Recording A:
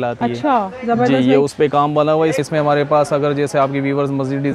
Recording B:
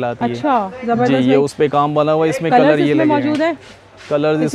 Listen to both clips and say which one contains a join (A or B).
A